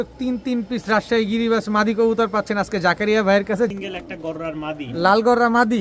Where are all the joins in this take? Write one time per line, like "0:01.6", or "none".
0:03.7